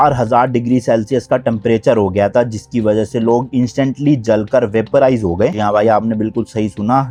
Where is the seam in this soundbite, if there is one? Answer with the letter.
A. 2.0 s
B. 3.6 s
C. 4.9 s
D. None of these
D